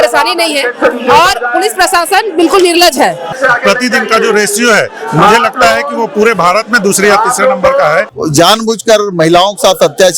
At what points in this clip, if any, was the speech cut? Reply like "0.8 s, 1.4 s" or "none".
3.3 s, 8.1 s